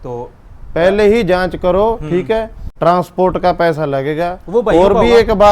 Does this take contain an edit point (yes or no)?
yes